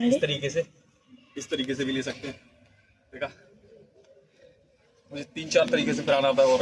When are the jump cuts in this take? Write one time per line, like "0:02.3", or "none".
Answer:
none